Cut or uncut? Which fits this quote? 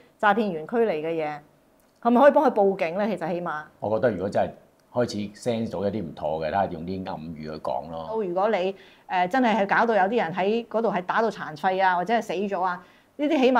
cut